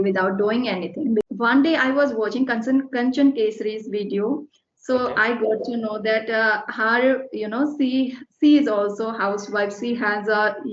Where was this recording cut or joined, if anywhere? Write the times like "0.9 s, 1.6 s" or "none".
1.2 s